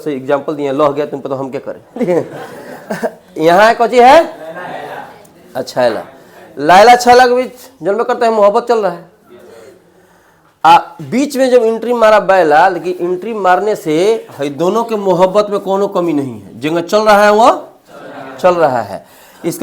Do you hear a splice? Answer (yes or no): no